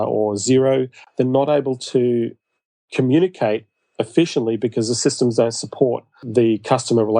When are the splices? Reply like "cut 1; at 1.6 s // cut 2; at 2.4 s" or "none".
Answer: cut 1; at 1.0 s // cut 2; at 6.2 s